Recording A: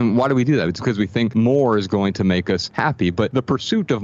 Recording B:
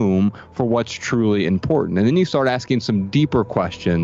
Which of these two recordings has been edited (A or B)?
A